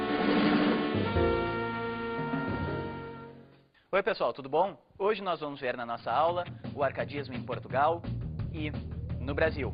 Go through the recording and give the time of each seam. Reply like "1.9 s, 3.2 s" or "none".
none